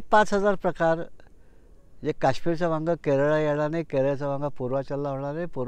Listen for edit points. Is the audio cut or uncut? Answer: uncut